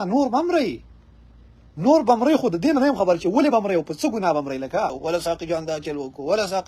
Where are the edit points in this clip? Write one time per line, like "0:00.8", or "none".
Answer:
0:05.0